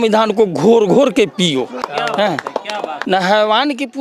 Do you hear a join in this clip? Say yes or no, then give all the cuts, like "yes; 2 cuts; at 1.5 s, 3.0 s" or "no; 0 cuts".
yes; 2 cuts; at 1.8 s, 3.0 s